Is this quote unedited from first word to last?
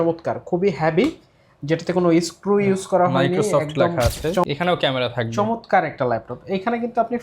no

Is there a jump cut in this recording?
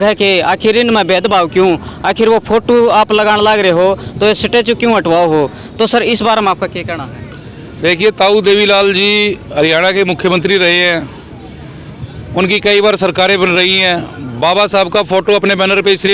no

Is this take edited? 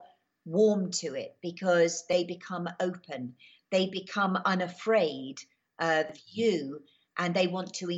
yes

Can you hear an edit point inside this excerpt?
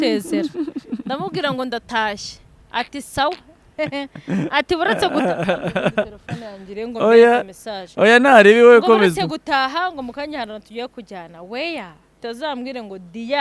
yes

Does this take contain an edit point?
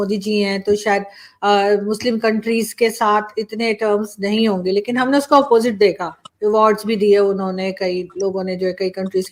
no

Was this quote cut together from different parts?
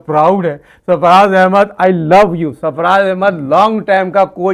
no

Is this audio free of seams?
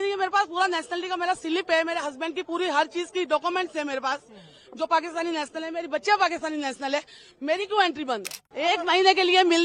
no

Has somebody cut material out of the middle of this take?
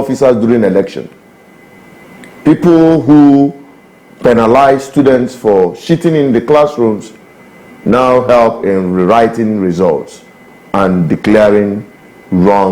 no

